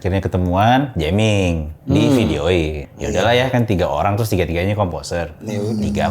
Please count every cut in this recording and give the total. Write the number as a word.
one